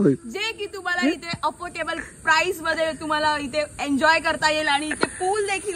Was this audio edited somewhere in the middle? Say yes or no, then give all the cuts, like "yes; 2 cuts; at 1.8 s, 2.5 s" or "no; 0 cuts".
no; 0 cuts